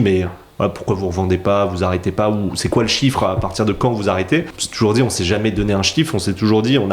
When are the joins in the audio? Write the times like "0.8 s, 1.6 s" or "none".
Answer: 4.6 s